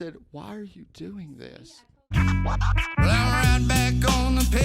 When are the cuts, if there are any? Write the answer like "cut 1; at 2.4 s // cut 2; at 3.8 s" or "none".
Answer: cut 1; at 1.4 s

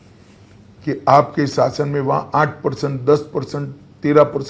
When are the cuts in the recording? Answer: none

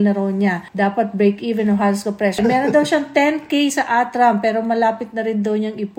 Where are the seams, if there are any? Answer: cut 1; at 2.4 s

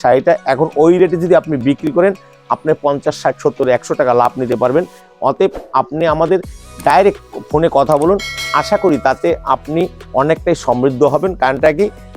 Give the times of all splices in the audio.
none

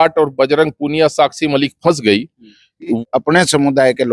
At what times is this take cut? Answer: cut 1; at 3.0 s

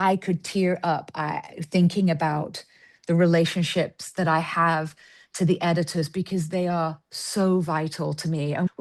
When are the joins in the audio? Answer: none

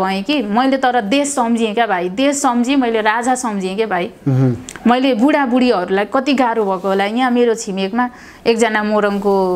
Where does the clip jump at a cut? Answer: none

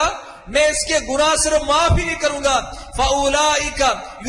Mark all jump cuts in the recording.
none

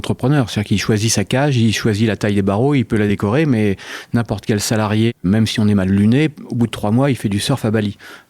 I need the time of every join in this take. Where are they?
cut 1; at 3.1 s // cut 2; at 5.2 s

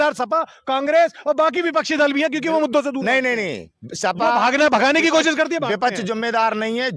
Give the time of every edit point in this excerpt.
none

